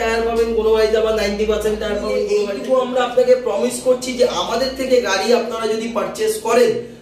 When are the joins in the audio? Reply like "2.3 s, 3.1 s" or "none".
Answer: 2.5 s